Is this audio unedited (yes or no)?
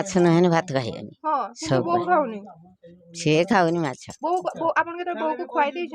yes